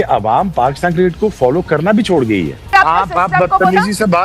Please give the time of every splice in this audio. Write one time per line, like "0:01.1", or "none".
0:02.7